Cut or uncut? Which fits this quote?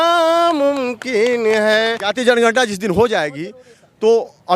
cut